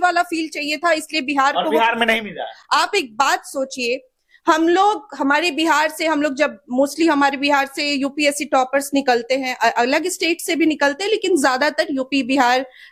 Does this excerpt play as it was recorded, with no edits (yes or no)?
yes